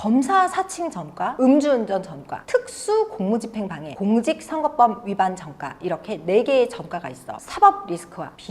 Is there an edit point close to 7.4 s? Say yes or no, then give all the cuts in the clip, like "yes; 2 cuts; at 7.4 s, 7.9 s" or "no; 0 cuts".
yes; 1 cut; at 7.4 s